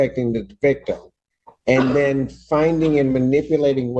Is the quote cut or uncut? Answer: uncut